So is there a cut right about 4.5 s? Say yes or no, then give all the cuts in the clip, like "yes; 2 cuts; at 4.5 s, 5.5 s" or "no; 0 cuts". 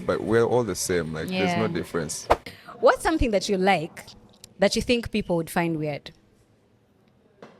no; 1 cut; at 2.6 s